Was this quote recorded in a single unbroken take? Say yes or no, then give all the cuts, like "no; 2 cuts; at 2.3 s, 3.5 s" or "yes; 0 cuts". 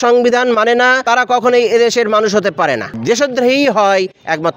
no; 2 cuts; at 1.0 s, 2.9 s